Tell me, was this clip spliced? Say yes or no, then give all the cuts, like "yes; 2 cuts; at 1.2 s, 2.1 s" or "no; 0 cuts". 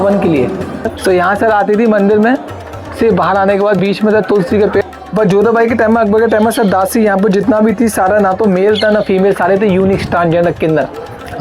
yes; 2 cuts; at 0.9 s, 4.8 s